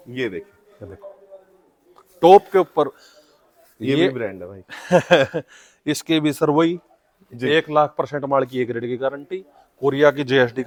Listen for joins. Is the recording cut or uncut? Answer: uncut